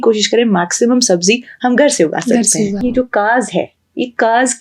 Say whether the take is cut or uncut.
cut